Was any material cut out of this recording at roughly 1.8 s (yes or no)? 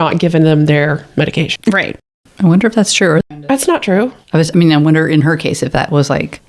yes